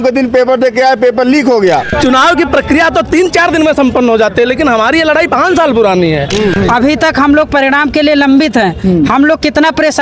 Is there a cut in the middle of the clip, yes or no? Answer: yes